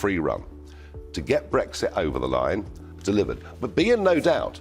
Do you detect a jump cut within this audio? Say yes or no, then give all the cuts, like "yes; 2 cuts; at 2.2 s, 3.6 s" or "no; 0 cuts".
yes; 1 cut; at 2.9 s